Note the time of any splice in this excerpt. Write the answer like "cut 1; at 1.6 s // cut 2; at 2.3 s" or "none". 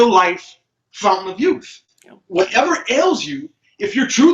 none